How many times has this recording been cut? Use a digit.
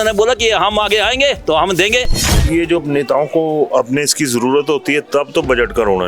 1